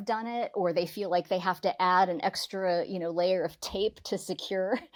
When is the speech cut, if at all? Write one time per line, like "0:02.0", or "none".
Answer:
none

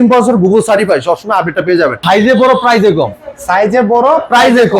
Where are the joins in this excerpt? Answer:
0:02.0

